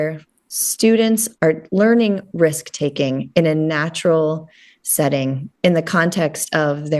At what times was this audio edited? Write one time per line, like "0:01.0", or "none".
0:01.3

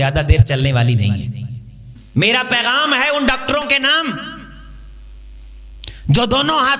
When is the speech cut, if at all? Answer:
0:01.9

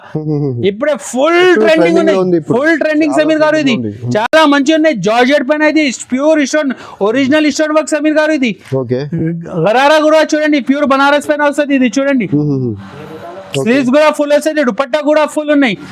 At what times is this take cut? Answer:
none

